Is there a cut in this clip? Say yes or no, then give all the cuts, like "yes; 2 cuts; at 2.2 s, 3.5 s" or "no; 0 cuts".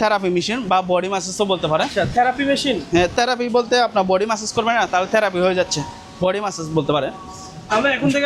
no; 0 cuts